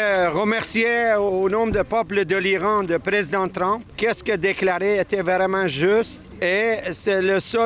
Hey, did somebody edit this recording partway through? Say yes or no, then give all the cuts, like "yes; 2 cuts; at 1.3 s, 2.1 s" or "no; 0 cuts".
yes; 2 cuts; at 3.9 s, 6.2 s